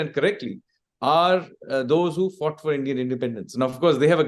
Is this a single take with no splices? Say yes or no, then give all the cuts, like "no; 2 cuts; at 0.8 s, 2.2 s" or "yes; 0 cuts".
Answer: yes; 0 cuts